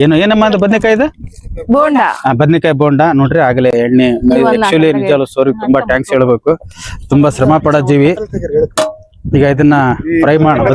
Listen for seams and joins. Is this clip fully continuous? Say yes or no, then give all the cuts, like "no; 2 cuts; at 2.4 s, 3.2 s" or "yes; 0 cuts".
yes; 0 cuts